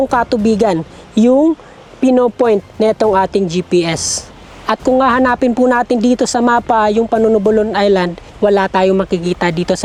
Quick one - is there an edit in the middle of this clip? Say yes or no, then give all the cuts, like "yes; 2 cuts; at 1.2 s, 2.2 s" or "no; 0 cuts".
no; 0 cuts